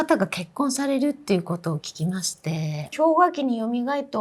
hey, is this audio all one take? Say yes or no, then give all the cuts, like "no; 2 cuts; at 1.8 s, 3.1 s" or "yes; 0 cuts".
no; 1 cut; at 2.8 s